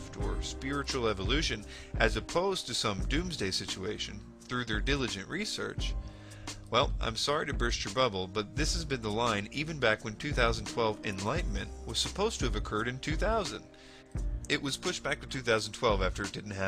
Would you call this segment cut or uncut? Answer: cut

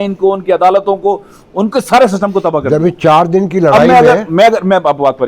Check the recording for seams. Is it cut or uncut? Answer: uncut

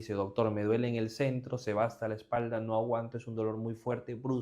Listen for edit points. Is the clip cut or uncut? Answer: uncut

